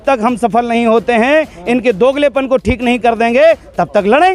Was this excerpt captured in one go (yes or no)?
yes